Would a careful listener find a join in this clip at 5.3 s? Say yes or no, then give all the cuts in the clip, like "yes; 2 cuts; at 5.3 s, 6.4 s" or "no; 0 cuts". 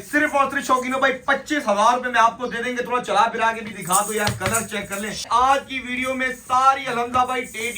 yes; 1 cut; at 5.3 s